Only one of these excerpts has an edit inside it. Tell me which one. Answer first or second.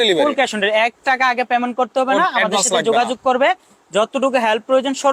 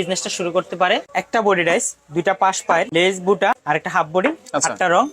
second